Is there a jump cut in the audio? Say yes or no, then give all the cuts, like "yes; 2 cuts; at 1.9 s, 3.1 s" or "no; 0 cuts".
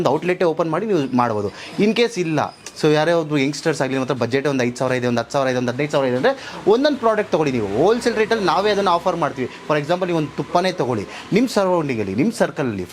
no; 0 cuts